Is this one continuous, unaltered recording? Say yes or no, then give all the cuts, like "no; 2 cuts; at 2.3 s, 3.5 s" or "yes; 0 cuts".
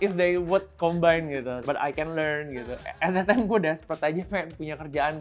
no; 1 cut; at 1.6 s